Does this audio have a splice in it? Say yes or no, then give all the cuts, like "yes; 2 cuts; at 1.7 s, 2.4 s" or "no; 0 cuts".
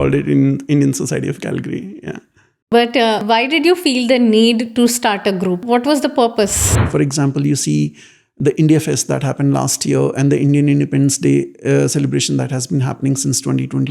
yes; 3 cuts; at 3.2 s, 5.6 s, 6.8 s